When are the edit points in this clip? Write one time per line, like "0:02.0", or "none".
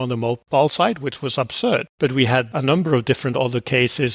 0:02.0